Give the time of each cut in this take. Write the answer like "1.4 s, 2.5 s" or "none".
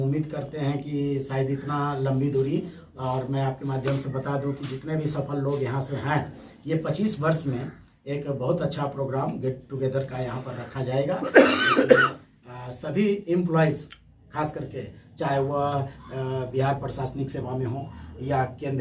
none